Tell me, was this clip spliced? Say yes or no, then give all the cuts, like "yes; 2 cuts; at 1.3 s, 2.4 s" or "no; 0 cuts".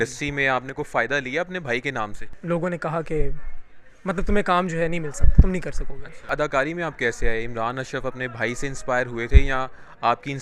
yes; 2 cuts; at 2.2 s, 6.2 s